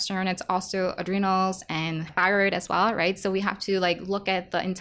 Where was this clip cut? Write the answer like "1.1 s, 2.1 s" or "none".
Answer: 2.1 s